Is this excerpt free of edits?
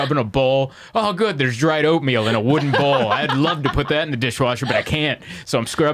yes; 0 cuts

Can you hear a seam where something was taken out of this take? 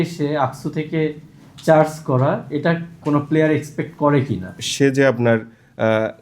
yes; 2 cuts; at 3.0 s, 4.6 s

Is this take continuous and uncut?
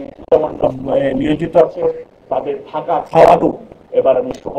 yes; 0 cuts

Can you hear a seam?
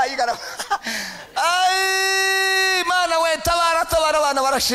no; 0 cuts

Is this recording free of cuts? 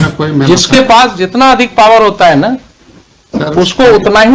yes; 0 cuts

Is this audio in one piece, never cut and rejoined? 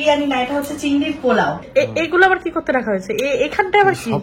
no; 1 cut; at 1.6 s

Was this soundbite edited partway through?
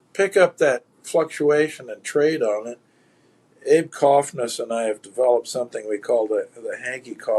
no; 0 cuts

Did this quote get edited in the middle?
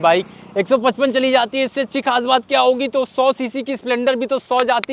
no; 0 cuts

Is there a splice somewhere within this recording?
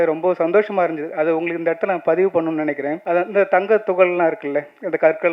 yes; 1 cut; at 3.0 s

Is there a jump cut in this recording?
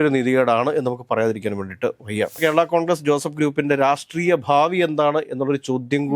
yes; 1 cut; at 2.4 s

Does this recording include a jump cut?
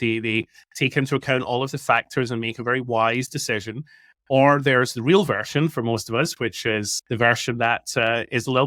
no; 0 cuts

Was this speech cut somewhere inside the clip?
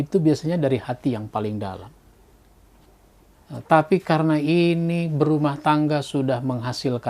yes; 1 cut; at 3.3 s

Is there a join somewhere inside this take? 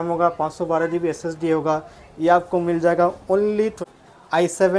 yes; 1 cut; at 3.8 s

